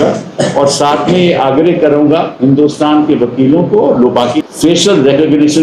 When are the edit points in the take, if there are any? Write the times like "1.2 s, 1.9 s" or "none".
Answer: 4.4 s